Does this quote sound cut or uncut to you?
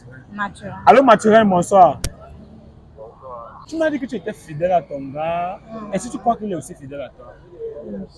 cut